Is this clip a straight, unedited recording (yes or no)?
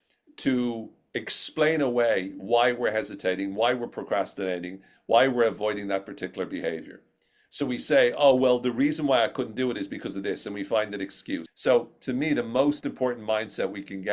no